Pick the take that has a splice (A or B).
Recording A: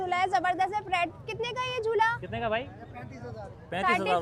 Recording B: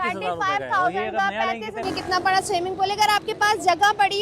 B